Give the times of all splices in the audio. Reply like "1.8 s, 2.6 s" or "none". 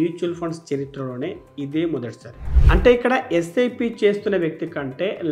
2.6 s